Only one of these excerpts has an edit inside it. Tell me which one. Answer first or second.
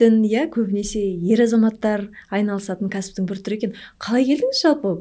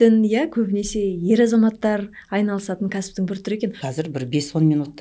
second